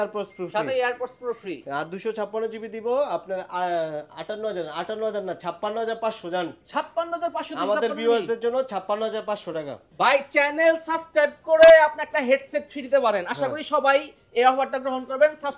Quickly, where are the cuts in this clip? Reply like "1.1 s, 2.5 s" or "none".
9.8 s